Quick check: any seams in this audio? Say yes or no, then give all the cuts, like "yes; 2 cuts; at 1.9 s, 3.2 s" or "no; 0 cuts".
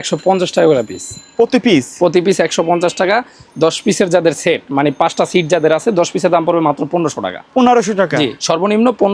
no; 0 cuts